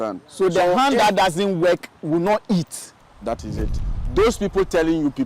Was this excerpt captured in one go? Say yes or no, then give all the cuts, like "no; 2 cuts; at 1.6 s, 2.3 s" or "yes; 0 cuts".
no; 1 cut; at 3.9 s